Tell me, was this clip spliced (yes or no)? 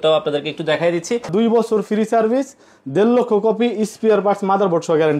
yes